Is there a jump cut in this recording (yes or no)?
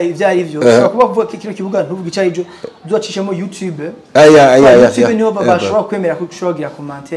no